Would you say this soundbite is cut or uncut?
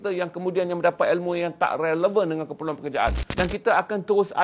cut